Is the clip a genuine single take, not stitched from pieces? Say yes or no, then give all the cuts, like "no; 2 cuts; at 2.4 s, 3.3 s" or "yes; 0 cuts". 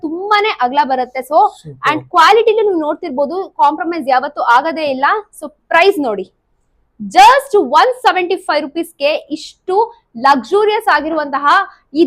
yes; 0 cuts